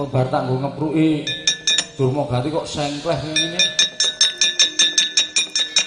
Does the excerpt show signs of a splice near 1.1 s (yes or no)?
no